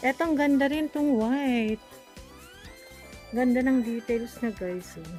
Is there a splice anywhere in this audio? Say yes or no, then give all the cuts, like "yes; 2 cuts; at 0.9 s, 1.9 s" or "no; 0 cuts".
no; 0 cuts